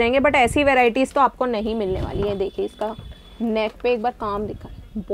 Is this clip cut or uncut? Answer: uncut